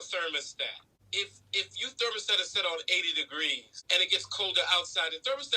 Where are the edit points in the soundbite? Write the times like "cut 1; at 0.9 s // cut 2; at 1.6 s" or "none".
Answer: cut 1; at 0.9 s // cut 2; at 3.7 s